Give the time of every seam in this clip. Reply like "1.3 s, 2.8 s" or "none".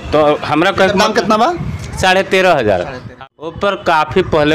3.2 s